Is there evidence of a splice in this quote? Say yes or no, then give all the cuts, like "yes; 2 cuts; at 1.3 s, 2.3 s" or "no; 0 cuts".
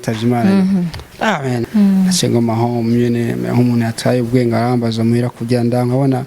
yes; 1 cut; at 1.6 s